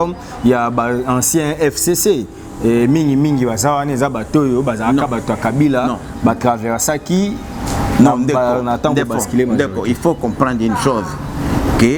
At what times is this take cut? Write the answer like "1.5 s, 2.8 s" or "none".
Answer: none